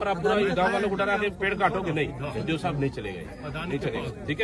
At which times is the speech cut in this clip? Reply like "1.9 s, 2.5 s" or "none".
none